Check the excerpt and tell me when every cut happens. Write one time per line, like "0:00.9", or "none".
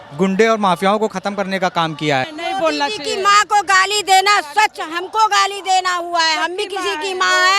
0:02.3

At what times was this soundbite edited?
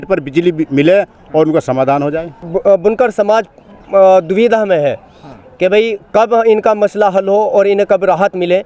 0:02.3

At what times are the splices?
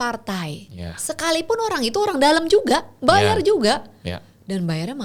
none

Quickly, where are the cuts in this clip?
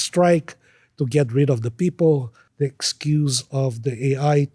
0:02.4

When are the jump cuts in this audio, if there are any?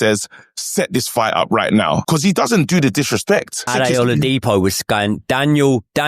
0:02.0
0:03.7

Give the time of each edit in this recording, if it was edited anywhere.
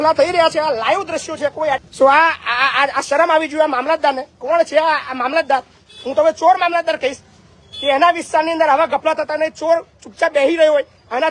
0:01.9

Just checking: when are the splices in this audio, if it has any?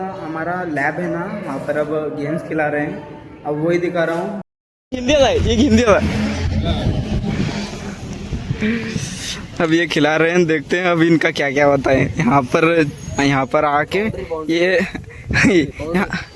0:04.4

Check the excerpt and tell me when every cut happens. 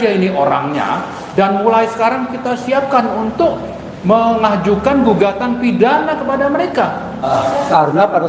0:07.3

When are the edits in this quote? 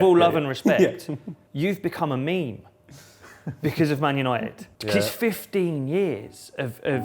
0:04.6

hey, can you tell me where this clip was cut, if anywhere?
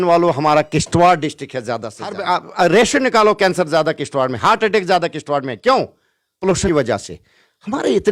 0:02.2
0:06.7

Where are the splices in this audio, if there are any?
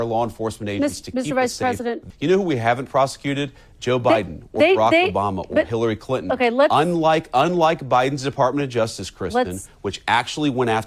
0:02.0

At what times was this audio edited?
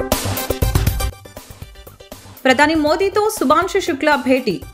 none

